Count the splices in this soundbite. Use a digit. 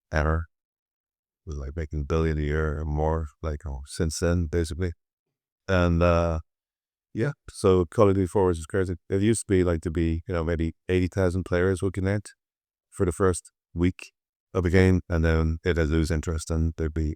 0